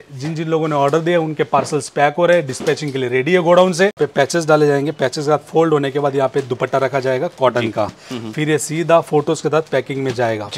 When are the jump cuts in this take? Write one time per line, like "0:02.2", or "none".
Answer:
0:04.0